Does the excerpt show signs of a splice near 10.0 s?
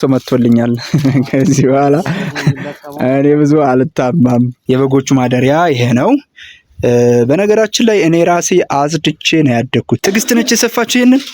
yes; 2 cuts; at 4.6 s, 10.0 s

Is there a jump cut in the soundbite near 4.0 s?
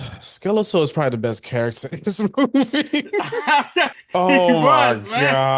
yes; 1 cut; at 4.0 s

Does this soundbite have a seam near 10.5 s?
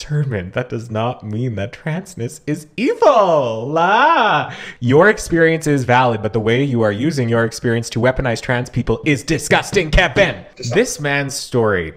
yes; 2 cuts; at 4.7 s, 10.5 s

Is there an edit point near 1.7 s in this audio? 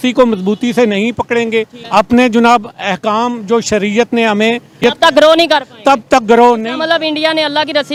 no; 0 cuts

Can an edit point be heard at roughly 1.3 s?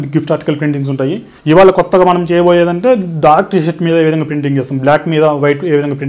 yes; 1 cut; at 1.3 s

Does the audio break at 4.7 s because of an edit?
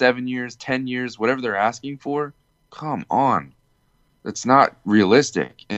no; 0 cuts

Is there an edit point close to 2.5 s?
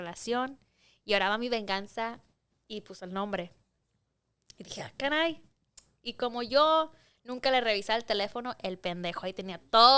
no; 0 cuts

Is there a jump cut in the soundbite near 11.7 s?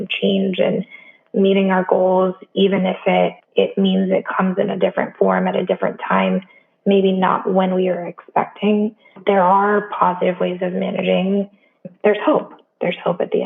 yes; 3 cuts; at 3.4 s, 9.2 s, 11.7 s

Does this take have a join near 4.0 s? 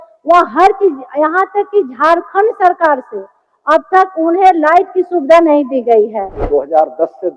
no; 1 cut; at 6.4 s

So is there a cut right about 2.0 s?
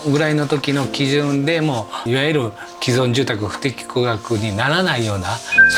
yes; 1 cut; at 2.0 s

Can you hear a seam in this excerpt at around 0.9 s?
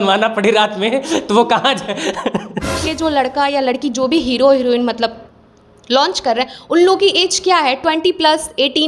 no; 1 cut; at 2.8 s

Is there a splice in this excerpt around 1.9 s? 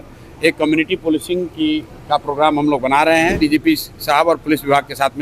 no; 1 cut; at 3.4 s

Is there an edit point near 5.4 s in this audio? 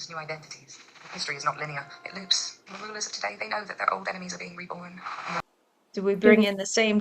yes; 1 cut; at 5.4 s

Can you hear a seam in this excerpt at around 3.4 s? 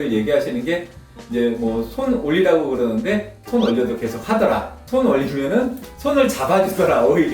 yes; 2 cuts; at 3.4 s, 4.7 s

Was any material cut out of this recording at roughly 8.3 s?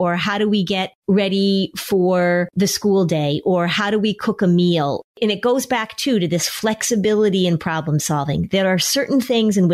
no; 3 cuts; at 0.9 s, 2.5 s, 5.1 s

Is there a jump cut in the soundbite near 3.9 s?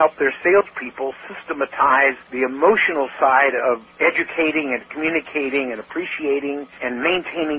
yes; 3 cuts; at 2.3 s, 3.9 s, 6.8 s

